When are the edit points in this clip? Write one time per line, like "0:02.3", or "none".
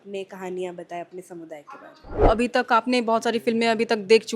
0:02.2